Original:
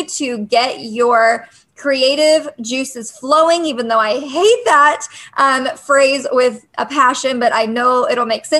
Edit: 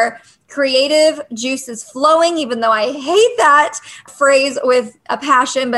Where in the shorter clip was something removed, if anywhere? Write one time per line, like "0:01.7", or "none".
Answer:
0:04.0